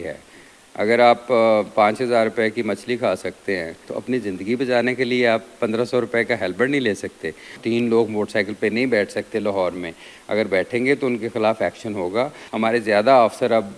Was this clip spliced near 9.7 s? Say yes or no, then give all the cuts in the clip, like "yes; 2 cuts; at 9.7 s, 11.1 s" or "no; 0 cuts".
no; 3 cuts; at 3.9 s, 7.6 s, 12.4 s